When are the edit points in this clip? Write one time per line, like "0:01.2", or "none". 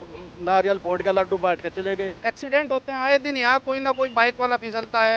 0:02.1

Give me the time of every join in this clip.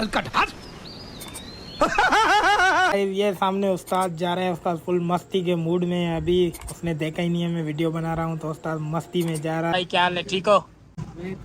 0:02.9
0:09.7

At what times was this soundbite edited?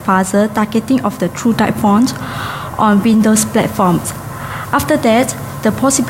0:03.2

